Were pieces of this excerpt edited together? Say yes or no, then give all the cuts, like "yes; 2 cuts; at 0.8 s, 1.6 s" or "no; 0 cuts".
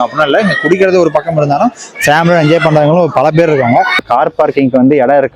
yes; 1 cut; at 4.0 s